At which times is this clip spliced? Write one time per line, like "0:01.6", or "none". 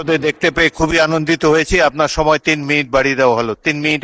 none